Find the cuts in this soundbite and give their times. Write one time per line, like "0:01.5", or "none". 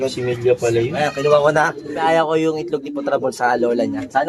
0:01.0
0:02.0